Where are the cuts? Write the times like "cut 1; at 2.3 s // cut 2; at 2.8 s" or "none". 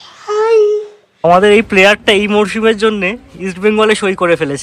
cut 1; at 1.2 s